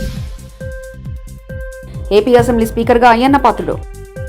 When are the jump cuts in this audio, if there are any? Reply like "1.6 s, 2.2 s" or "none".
1.8 s